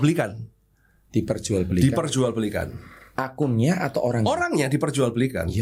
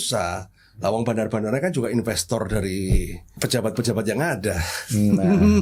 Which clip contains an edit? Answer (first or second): second